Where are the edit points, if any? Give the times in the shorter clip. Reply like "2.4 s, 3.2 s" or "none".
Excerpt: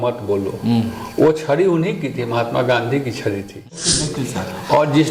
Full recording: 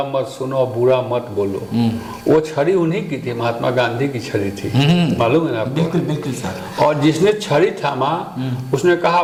3.6 s

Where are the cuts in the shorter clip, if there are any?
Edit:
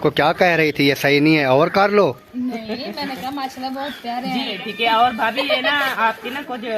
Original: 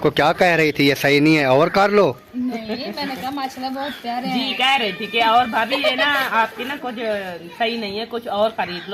4.5 s

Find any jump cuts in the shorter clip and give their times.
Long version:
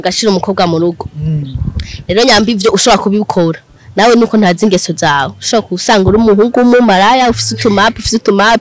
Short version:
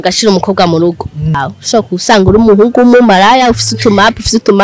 1.5 s

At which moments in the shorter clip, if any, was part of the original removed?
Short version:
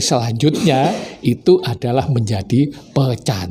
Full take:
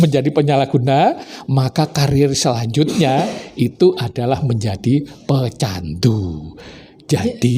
none

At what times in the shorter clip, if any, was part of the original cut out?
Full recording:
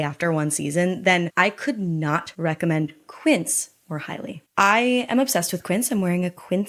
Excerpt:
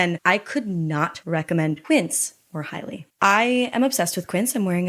1.8 s

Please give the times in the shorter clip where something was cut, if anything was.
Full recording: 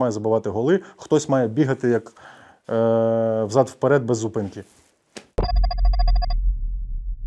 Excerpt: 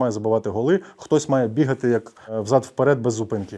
2.4 s

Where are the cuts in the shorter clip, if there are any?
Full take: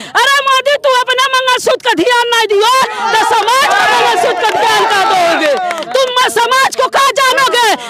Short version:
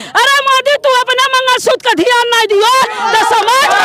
none

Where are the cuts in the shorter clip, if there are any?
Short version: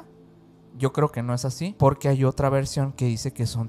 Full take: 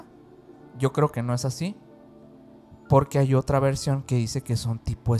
1.7 s

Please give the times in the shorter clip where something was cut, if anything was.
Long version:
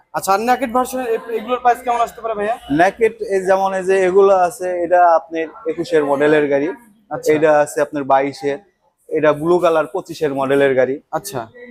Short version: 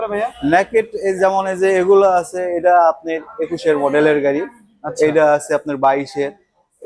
none

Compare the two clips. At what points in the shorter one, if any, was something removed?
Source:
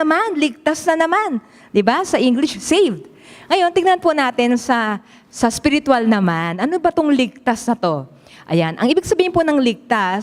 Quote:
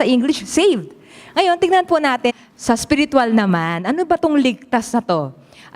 2.3 s

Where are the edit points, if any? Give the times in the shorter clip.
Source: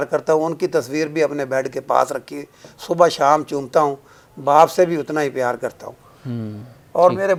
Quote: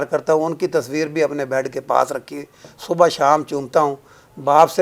none

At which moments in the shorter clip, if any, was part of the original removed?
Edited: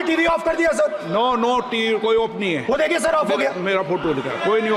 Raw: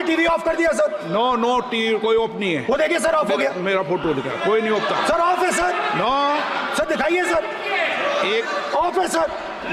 none

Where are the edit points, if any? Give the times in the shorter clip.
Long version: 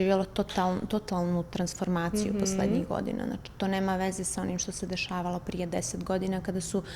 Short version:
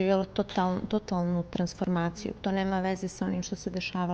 2.1 s

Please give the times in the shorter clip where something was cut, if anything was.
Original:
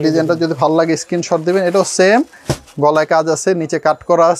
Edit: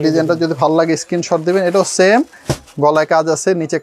none

